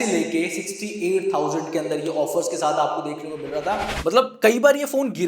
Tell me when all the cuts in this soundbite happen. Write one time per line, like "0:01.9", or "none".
0:03.9